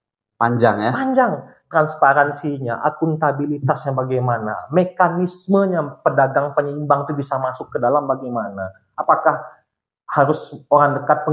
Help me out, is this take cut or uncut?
uncut